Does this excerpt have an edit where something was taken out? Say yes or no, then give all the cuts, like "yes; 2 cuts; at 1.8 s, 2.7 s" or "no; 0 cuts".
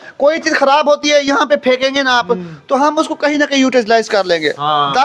no; 0 cuts